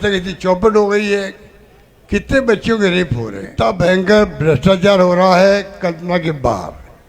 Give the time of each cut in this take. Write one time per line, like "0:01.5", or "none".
0:03.5